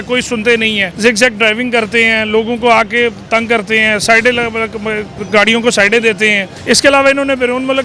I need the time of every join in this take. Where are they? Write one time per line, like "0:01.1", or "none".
0:00.9
0:05.1
0:06.5